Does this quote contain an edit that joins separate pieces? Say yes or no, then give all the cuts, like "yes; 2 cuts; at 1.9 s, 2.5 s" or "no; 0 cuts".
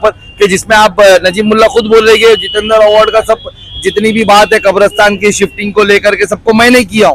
no; 0 cuts